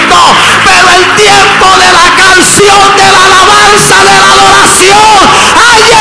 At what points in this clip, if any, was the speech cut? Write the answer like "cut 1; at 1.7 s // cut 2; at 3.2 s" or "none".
none

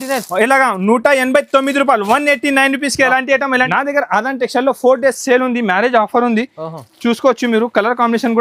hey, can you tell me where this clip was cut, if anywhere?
cut 1; at 3.7 s

